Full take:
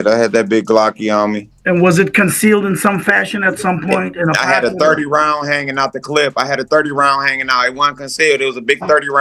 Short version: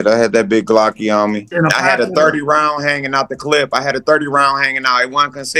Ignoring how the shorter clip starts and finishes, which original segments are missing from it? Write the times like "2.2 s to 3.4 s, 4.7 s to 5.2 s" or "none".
1.5 s to 4.1 s